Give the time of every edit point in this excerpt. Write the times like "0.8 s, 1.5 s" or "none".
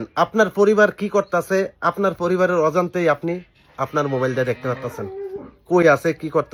none